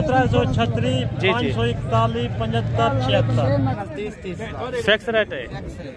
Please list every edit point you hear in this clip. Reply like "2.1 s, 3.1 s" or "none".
3.8 s

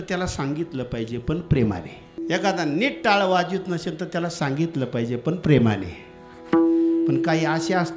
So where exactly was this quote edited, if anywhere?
2.1 s

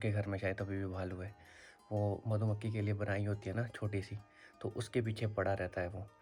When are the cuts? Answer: none

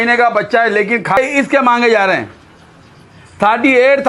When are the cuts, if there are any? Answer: 1.2 s

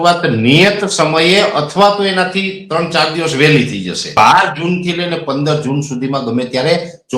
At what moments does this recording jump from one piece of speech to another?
4.2 s

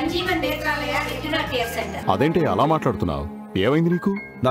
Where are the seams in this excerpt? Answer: 2.0 s

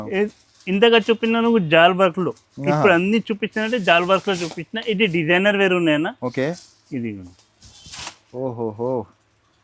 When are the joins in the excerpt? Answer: none

